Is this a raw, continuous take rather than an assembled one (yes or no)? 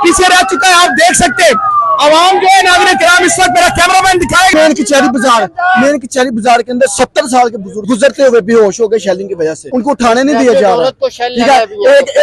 no